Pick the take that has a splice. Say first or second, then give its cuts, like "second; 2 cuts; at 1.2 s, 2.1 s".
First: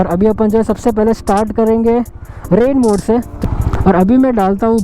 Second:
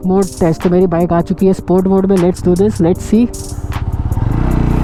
first; 1 cut; at 3.3 s